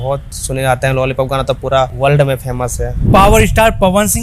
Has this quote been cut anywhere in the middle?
yes; 1 cut; at 3.0 s

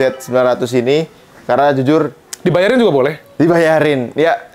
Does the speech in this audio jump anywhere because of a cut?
no; 0 cuts

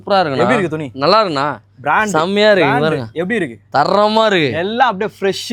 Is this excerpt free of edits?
yes; 0 cuts

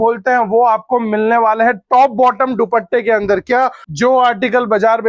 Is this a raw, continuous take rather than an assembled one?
no; 1 cut; at 3.8 s

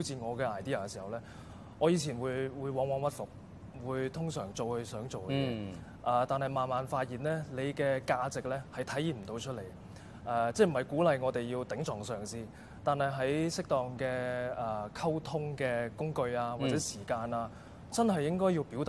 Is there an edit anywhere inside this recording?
no; 0 cuts

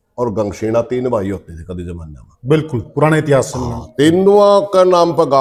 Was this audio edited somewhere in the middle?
no; 0 cuts

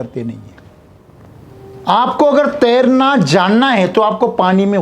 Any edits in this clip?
yes; 1 cut; at 1.5 s

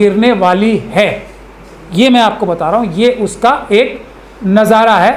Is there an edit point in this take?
no; 0 cuts

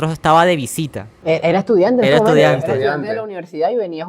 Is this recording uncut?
yes; 0 cuts

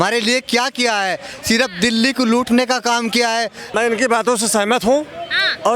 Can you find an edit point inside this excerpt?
yes; 1 cut; at 3.6 s

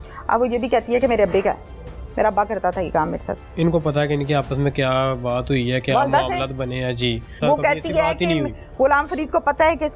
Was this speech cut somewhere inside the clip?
yes; 2 cuts; at 3.5 s, 7.3 s

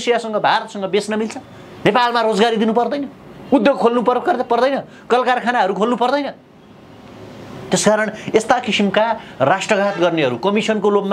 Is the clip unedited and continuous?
yes; 0 cuts

